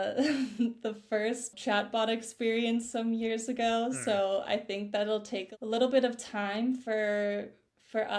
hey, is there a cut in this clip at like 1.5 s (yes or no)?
yes